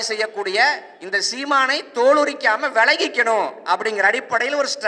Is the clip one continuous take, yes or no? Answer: yes